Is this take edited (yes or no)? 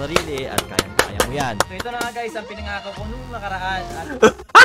no